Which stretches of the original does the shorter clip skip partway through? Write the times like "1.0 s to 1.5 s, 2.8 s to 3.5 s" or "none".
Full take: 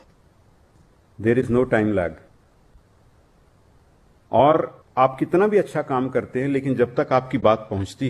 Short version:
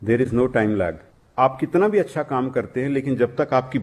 2.4 s to 4.8 s